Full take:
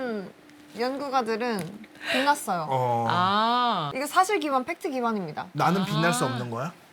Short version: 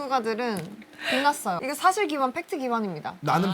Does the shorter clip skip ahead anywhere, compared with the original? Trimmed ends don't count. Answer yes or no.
yes